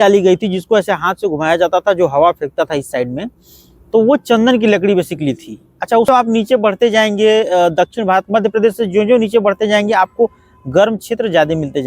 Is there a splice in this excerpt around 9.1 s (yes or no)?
no